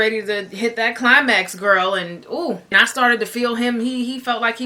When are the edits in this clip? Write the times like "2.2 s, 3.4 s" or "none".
2.7 s